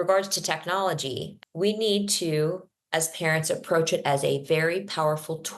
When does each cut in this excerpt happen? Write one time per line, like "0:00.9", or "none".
0:01.3